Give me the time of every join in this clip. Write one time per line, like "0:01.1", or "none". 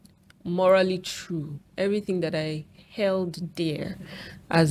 none